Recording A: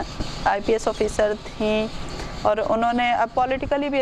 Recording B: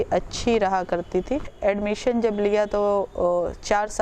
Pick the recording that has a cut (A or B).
B